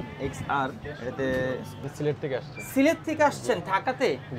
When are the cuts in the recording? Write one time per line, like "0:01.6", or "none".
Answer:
0:01.9